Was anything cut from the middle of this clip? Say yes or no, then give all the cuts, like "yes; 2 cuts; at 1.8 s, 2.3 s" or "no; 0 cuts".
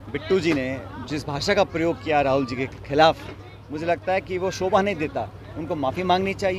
no; 0 cuts